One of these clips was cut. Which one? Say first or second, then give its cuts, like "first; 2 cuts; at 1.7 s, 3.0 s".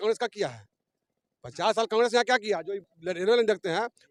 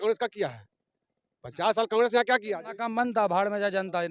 second; 1 cut; at 2.7 s